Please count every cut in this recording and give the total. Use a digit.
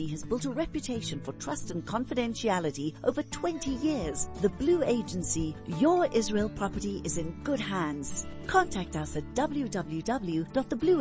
0